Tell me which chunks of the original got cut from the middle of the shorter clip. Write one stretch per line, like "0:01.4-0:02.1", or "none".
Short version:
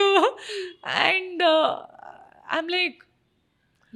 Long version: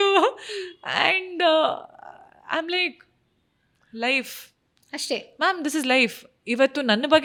none

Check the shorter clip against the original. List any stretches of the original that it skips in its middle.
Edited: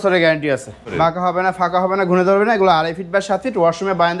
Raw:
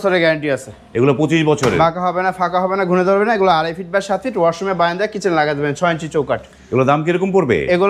0:00.9-0:01.7

